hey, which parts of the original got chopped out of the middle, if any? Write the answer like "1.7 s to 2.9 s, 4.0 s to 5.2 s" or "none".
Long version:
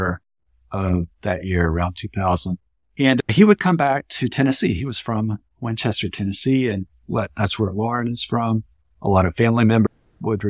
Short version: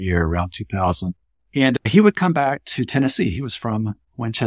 none